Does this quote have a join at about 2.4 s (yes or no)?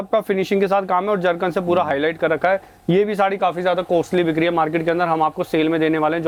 no